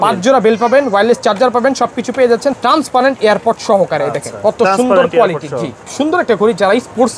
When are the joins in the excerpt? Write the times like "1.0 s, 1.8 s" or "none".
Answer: 2.5 s, 5.8 s